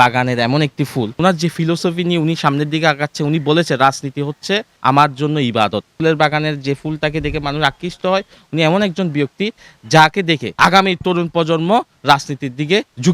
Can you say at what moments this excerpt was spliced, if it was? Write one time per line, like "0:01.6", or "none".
0:01.2
0:04.7
0:05.9
0:10.5